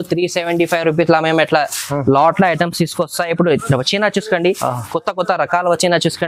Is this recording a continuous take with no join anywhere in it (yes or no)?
yes